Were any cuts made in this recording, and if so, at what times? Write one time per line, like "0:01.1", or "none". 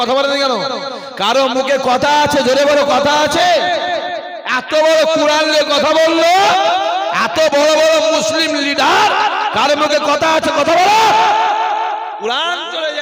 none